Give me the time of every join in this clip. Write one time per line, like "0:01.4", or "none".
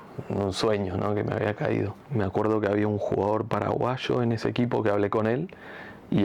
0:02.0